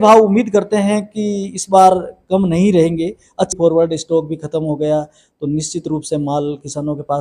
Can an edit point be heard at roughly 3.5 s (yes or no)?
yes